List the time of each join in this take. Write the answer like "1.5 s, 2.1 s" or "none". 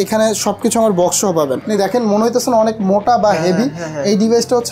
1.6 s

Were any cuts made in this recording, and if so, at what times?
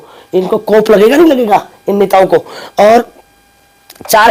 none

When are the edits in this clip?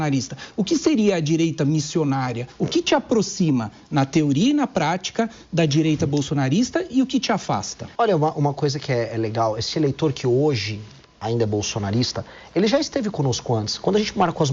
2.5 s, 7.8 s

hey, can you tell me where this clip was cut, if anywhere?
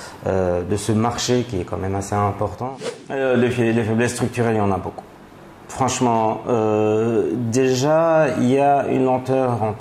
2.6 s

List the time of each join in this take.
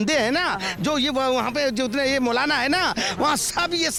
none

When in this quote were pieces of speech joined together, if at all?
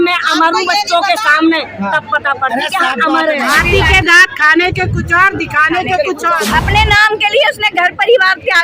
3.4 s, 6.4 s

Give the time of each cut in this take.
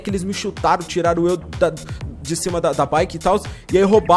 none

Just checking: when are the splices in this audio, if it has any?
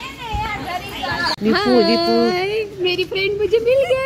1.4 s

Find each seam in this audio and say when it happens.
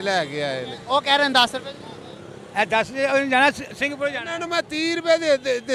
none

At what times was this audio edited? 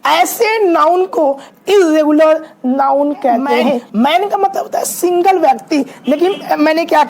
3.9 s

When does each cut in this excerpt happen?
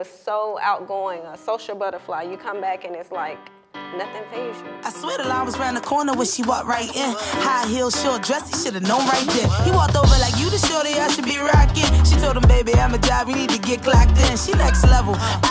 4.6 s

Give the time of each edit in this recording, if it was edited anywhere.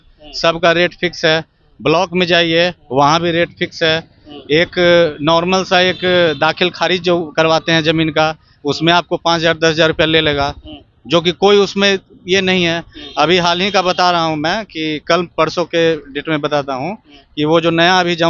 none

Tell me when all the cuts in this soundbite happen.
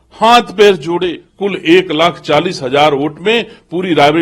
1.2 s

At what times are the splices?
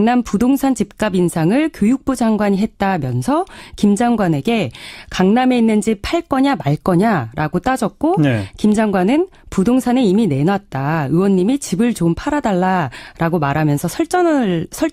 none

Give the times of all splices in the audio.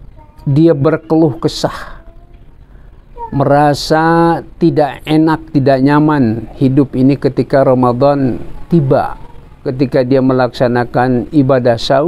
9.6 s

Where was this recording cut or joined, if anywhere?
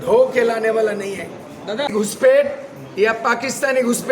1.9 s

